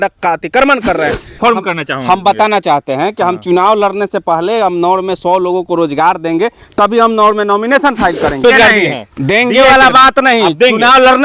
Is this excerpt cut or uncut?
cut